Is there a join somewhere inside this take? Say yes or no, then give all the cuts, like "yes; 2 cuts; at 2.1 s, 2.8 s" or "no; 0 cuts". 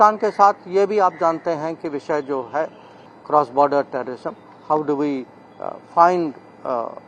yes; 1 cut; at 3.0 s